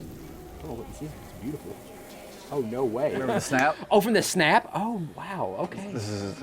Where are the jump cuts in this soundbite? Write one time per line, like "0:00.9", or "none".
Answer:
0:03.3